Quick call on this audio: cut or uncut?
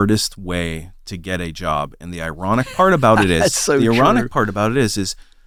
uncut